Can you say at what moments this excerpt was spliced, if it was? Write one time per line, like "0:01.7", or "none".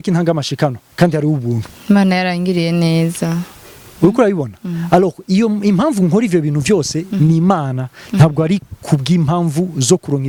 none